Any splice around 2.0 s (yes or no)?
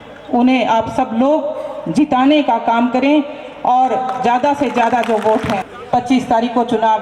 no